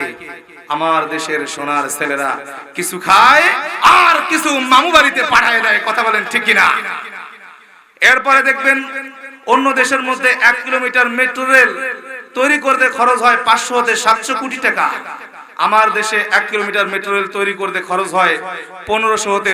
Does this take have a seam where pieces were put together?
no; 0 cuts

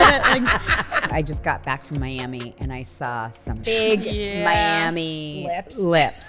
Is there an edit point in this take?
yes; 2 cuts; at 1.1 s, 3.7 s

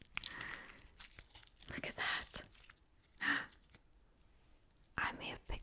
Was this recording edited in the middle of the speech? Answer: no; 0 cuts

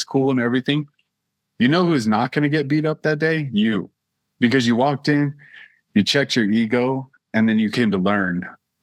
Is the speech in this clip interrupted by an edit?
no; 0 cuts

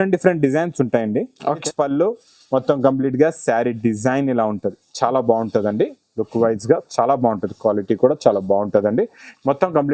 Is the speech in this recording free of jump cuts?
no; 1 cut; at 1.6 s

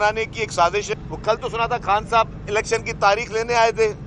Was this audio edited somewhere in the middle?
yes; 1 cut; at 0.9 s

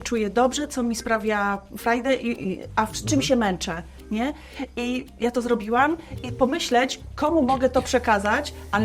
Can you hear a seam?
no; 0 cuts

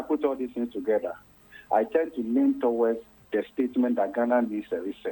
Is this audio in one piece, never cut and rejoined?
no; 1 cut; at 3.1 s

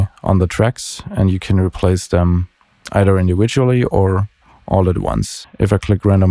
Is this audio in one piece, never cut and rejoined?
no; 1 cut; at 5.4 s

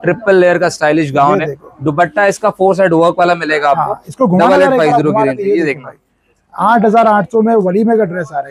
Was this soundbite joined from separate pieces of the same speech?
no; 0 cuts

